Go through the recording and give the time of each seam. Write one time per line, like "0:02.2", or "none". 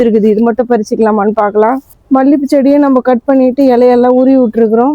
0:01.9

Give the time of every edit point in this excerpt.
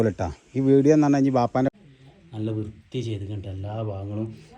0:01.7

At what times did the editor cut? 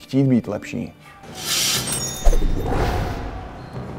0:01.1

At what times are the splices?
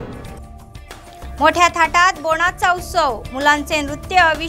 0:01.1

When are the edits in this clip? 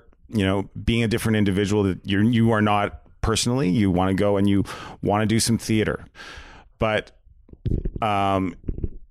0:06.1

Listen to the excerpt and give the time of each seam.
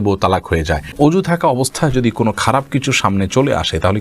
0:01.1

